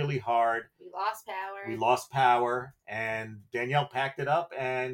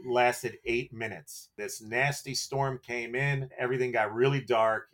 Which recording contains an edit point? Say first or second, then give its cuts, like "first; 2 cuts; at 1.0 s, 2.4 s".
second; 2 cuts; at 1.5 s, 3.5 s